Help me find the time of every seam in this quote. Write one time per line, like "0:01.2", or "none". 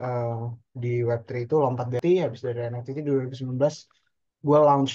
none